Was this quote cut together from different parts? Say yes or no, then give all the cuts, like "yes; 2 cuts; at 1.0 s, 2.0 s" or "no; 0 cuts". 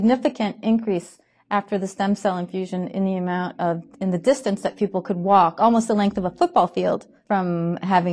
no; 0 cuts